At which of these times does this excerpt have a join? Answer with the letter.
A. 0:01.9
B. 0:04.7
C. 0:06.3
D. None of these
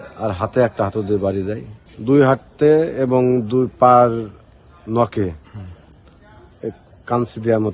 A